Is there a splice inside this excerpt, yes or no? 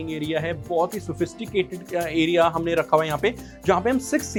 no